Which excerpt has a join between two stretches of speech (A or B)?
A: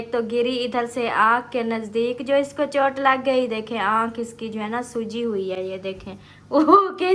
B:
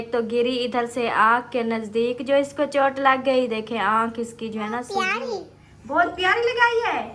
B